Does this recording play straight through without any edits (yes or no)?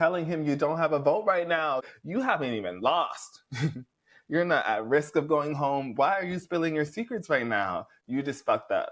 no